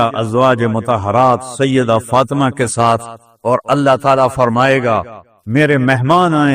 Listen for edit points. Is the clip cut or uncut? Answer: uncut